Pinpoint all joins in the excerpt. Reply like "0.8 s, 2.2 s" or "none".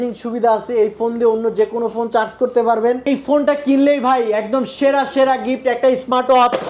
3.1 s

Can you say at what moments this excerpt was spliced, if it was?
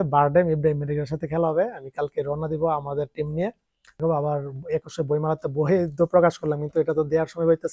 4.0 s

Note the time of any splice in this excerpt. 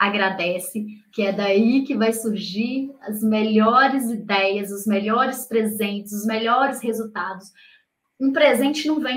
8.0 s

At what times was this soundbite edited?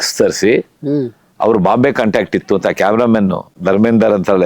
3.5 s

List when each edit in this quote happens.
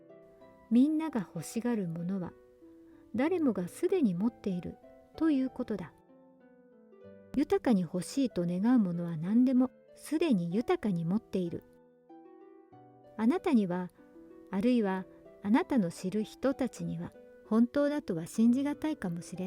none

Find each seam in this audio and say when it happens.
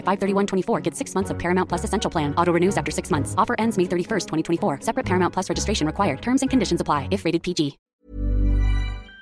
7.8 s

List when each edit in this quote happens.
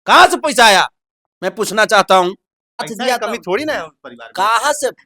2.9 s

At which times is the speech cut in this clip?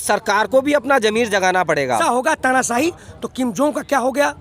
2.0 s

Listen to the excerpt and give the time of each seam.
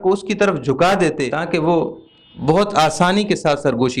1.3 s

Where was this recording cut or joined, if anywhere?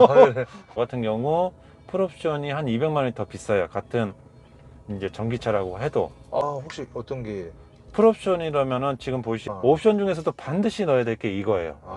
0.8 s, 6.4 s, 9.5 s

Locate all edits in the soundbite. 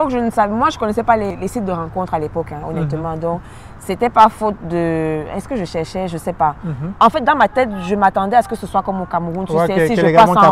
1.3 s, 6.8 s

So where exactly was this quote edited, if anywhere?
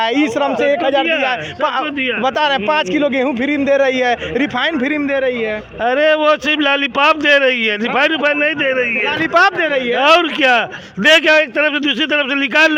none

